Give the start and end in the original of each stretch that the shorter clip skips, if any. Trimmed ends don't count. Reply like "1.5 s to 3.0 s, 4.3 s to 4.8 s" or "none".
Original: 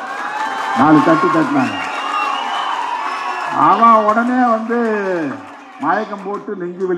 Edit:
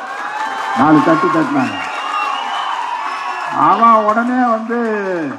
none